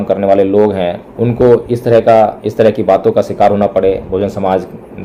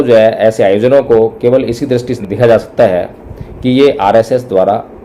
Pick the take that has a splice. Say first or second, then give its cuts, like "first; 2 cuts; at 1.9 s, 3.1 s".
second; 1 cut; at 2.1 s